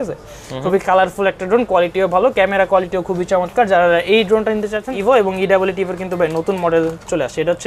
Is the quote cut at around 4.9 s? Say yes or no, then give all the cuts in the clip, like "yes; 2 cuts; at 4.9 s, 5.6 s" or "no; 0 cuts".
yes; 1 cut; at 4.9 s